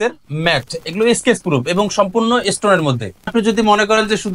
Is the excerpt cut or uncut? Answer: cut